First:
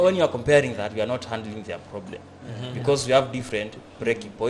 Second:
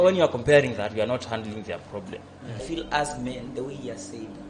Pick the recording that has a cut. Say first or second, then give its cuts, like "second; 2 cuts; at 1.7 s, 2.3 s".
second; 1 cut; at 2.6 s